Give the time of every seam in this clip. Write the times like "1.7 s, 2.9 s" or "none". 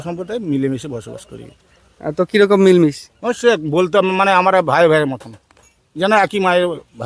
none

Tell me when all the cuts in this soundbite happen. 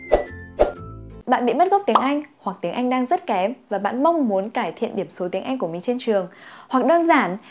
0.9 s

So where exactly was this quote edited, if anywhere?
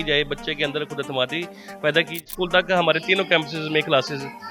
2.2 s

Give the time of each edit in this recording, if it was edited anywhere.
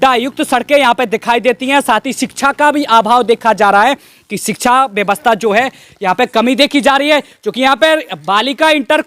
none

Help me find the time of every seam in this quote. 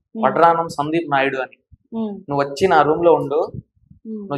none

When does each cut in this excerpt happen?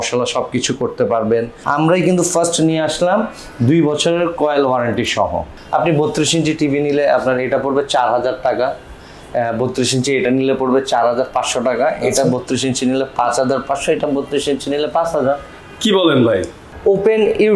1.6 s, 5.5 s, 16.7 s

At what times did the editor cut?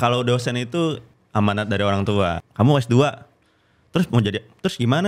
1.1 s, 2.4 s

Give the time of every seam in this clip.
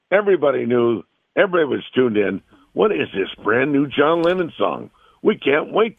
none

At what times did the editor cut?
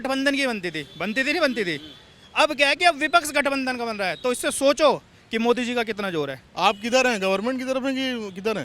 6.4 s

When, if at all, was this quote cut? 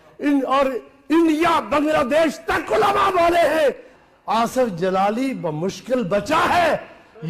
3.9 s

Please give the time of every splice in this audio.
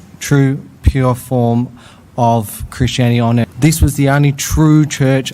3.4 s

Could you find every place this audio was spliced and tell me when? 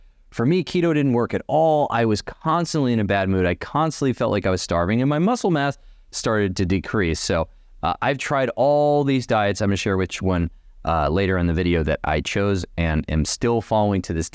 none

